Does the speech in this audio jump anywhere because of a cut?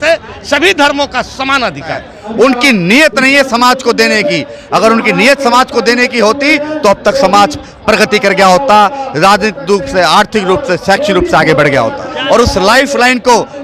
yes; 2 cuts; at 2.2 s, 12.1 s

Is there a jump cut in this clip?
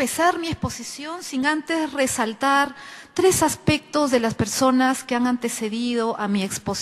yes; 1 cut; at 5.5 s

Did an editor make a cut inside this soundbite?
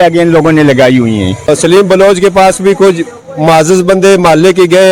yes; 1 cut; at 1.5 s

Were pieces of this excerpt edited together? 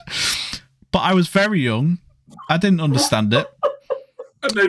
no; 0 cuts

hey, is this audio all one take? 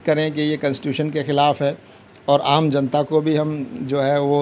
yes; 0 cuts

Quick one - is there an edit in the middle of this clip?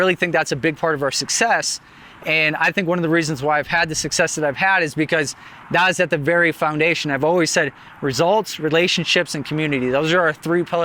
no; 0 cuts

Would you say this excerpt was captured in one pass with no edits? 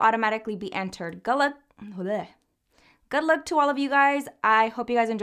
yes; 0 cuts

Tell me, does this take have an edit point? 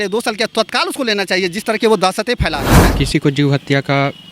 yes; 1 cut; at 2.9 s

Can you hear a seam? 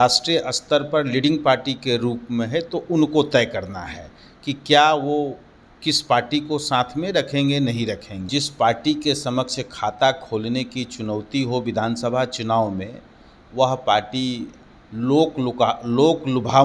yes; 1 cut; at 8.2 s

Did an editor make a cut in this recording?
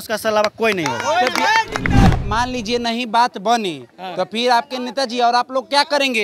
yes; 1 cut; at 2.1 s

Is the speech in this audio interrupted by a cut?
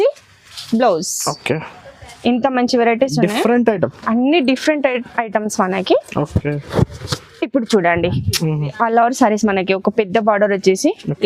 yes; 1 cut; at 8.7 s

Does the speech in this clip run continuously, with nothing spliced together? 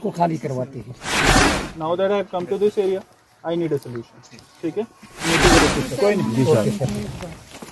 no; 2 cuts; at 1.4 s, 5.6 s

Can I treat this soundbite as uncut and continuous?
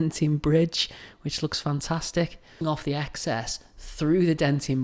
no; 1 cut; at 2.6 s

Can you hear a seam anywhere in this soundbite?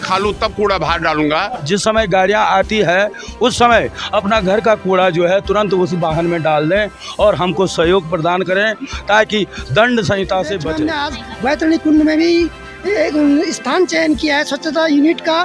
yes; 2 cuts; at 1.6 s, 10.7 s

